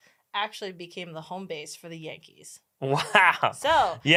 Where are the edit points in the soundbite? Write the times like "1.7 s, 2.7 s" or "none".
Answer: none